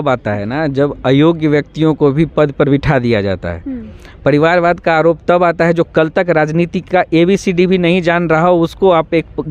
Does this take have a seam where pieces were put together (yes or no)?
no